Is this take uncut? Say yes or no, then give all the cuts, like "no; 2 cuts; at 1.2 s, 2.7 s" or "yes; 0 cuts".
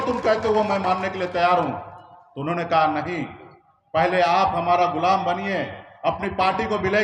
yes; 0 cuts